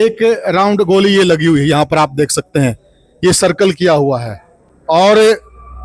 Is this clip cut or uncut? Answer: uncut